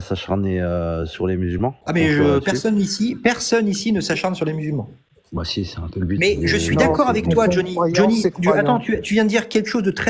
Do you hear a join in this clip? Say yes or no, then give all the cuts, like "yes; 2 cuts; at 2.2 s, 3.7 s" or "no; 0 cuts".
yes; 1 cut; at 1.8 s